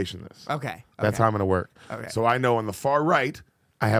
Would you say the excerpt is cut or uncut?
uncut